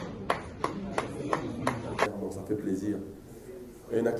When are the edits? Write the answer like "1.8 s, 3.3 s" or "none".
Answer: 2.2 s